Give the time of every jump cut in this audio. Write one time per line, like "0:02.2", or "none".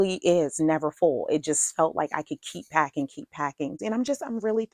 0:03.8